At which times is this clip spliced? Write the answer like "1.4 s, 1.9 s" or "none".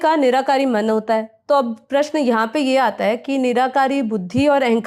none